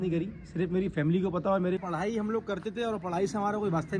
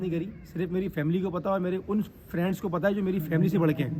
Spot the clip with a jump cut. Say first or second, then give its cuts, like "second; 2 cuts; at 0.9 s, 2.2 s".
first; 1 cut; at 1.8 s